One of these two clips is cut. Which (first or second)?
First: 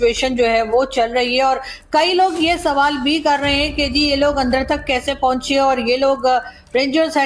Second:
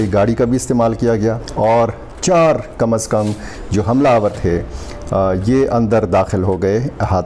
second